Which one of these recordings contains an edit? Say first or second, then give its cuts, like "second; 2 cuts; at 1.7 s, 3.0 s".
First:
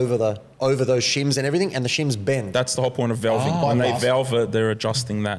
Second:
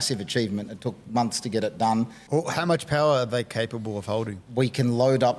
second; 2 cuts; at 2.2 s, 4.4 s